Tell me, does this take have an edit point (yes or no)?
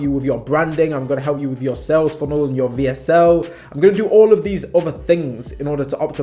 no